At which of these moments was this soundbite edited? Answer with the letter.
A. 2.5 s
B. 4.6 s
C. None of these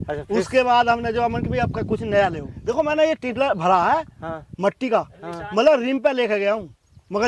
A